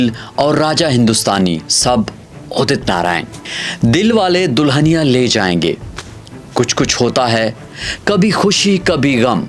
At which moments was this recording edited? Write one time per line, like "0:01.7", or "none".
0:03.3